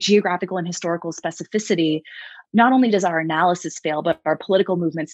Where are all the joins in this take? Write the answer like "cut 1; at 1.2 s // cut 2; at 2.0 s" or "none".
cut 1; at 2.4 s